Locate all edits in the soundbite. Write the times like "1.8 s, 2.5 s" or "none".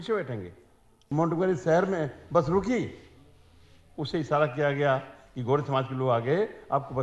1.0 s